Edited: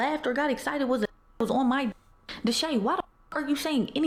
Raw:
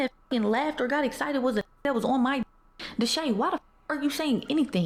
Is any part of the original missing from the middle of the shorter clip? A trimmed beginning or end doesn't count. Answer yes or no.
no